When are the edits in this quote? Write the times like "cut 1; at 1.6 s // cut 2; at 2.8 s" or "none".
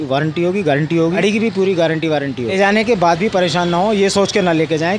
cut 1; at 1.2 s // cut 2; at 2.5 s